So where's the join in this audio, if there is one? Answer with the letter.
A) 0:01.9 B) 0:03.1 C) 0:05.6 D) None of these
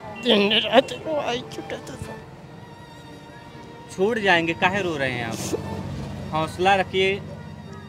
D